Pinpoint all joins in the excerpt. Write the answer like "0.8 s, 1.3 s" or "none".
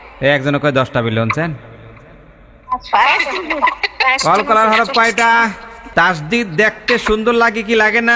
5.8 s